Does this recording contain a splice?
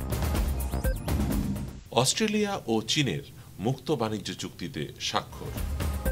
no; 0 cuts

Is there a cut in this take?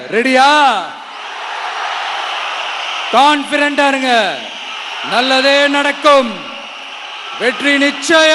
no; 0 cuts

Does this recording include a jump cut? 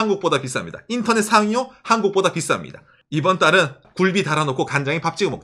yes; 2 cuts; at 3.0 s, 3.8 s

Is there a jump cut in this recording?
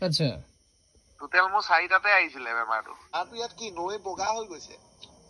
yes; 1 cut; at 3.1 s

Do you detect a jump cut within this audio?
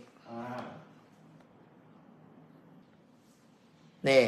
yes; 1 cut; at 2.8 s

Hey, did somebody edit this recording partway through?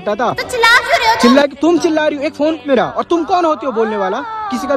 yes; 1 cut; at 2.6 s

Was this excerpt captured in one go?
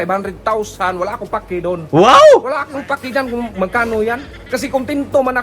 yes; 0 cuts

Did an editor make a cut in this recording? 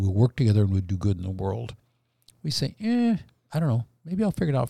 no; 0 cuts

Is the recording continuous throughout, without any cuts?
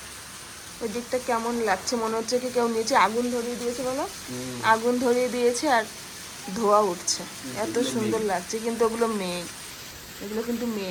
yes; 0 cuts

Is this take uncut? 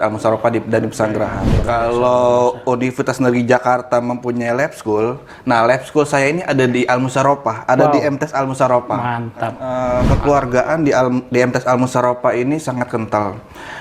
no; 2 cuts; at 1.5 s, 9.6 s

